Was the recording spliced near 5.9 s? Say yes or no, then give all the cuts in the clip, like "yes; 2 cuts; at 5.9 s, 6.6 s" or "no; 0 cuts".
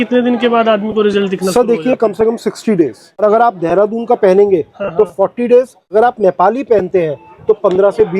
yes; 2 cuts; at 3.2 s, 5.9 s